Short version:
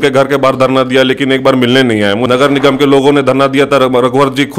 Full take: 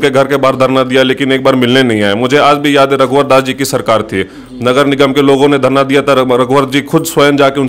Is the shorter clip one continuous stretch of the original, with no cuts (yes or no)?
no